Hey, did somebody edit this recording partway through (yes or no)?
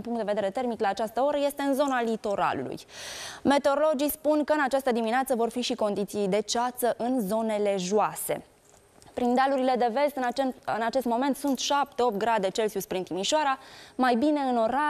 no